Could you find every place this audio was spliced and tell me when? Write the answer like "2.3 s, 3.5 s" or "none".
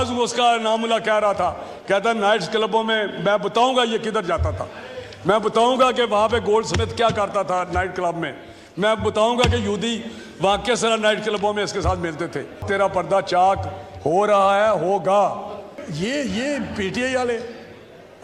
12.6 s, 15.8 s